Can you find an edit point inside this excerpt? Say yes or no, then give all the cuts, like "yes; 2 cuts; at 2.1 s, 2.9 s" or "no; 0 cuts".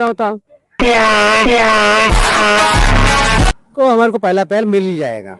yes; 1 cut; at 3.5 s